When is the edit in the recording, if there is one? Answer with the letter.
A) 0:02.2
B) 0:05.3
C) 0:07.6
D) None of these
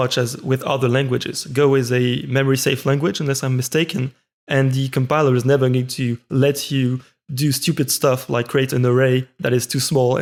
D